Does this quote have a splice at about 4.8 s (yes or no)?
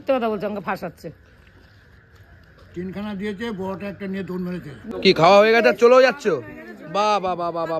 yes